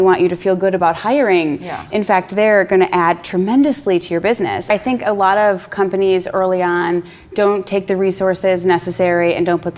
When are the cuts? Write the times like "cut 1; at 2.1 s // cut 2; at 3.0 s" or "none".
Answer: cut 1; at 4.7 s